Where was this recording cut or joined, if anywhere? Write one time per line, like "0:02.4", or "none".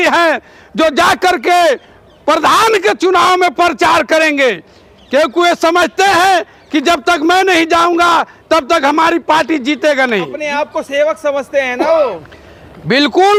none